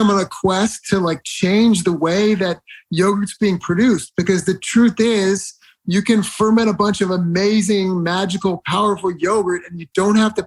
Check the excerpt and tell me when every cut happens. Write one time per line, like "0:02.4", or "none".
none